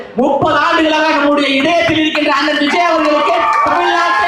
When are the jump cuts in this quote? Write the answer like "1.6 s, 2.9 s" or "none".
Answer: none